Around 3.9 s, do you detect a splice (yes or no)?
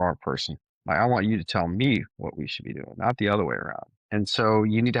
yes